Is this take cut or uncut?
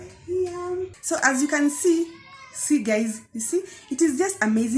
cut